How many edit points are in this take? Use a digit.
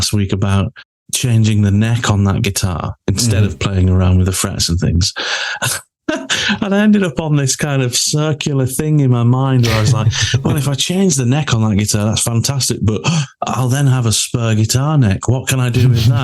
1